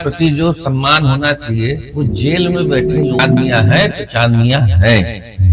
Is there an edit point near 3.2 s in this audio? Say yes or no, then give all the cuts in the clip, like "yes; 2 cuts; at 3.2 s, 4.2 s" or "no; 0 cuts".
yes; 1 cut; at 3.2 s